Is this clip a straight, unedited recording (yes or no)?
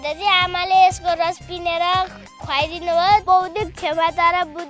no